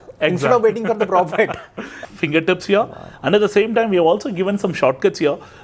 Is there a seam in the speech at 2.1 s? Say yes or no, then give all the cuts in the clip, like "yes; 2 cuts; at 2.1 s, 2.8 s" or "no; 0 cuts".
yes; 1 cut; at 2.1 s